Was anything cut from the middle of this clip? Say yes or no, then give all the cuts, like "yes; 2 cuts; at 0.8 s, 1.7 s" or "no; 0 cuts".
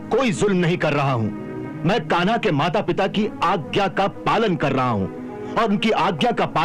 no; 0 cuts